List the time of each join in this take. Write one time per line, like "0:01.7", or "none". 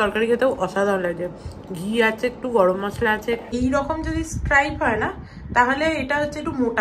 0:03.5